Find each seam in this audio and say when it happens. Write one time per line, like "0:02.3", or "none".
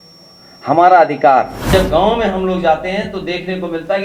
0:01.7